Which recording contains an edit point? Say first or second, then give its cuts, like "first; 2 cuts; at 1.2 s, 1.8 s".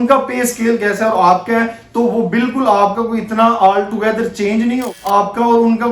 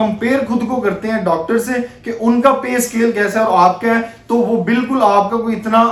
first; 1 cut; at 4.8 s